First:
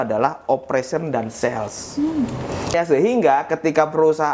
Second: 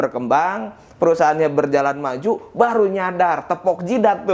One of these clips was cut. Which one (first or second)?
first